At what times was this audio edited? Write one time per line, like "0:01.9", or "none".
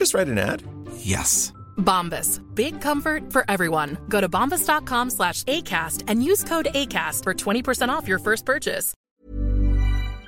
0:09.0